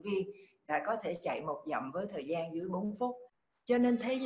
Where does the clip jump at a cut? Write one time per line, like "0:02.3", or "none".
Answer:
0:03.3